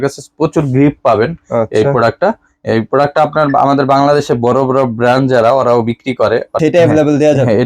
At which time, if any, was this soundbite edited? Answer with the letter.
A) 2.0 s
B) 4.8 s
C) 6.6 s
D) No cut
C